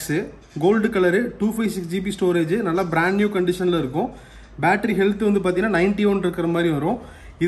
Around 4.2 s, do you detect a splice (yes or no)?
no